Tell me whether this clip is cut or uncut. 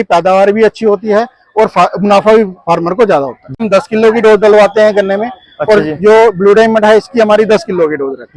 cut